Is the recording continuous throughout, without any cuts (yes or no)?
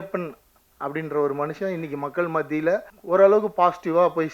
no